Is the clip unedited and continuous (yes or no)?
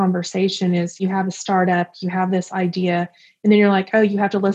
no